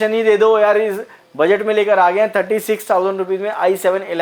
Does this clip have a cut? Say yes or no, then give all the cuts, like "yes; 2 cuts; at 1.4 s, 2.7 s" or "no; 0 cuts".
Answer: no; 0 cuts